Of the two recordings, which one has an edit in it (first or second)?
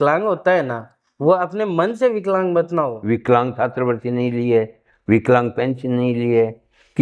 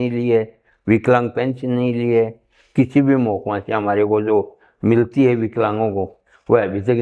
first